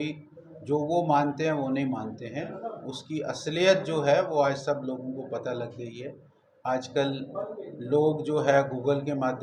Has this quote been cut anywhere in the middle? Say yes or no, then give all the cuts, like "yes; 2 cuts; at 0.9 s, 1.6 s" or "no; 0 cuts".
no; 0 cuts